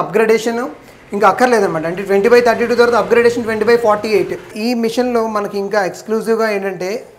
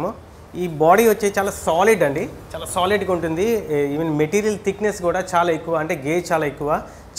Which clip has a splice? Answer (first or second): first